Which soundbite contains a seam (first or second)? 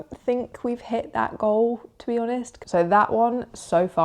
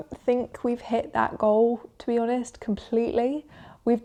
first